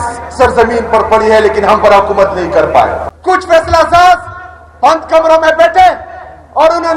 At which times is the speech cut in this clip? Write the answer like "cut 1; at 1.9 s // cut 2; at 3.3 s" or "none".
cut 1; at 3.0 s